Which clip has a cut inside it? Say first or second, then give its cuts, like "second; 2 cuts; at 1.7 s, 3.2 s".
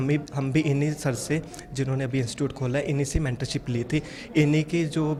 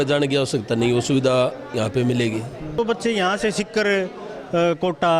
second; 1 cut; at 2.8 s